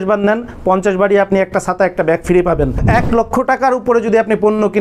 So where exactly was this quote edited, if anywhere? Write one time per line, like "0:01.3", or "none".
0:02.8